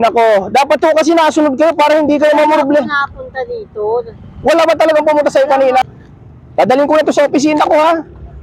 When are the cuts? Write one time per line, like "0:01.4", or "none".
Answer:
0:05.8

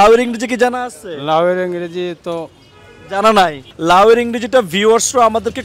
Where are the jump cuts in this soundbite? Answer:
0:03.7

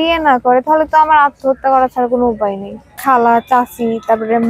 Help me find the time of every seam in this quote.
0:03.0

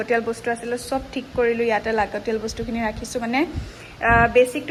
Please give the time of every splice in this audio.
none

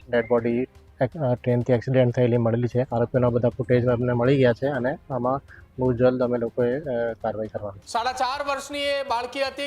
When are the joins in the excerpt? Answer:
0:02.9
0:07.8

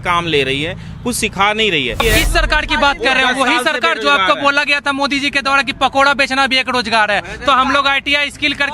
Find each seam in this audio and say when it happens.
0:02.0

